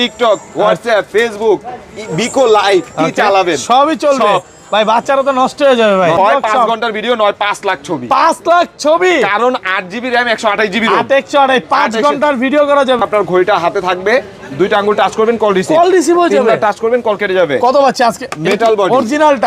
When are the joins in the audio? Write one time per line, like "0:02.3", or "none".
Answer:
0:06.2
0:13.0